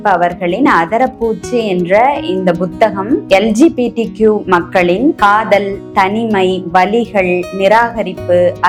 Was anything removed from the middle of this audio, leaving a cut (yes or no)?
no